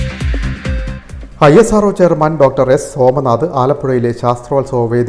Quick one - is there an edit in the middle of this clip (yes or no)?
yes